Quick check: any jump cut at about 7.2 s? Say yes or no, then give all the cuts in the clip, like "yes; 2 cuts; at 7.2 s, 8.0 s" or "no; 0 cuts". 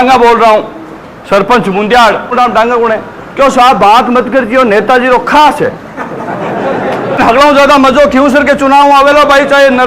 yes; 2 cuts; at 2.3 s, 7.2 s